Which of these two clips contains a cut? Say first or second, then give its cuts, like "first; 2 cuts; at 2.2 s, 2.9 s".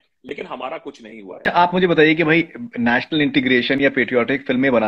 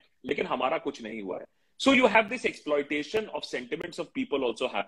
first; 1 cut; at 1.4 s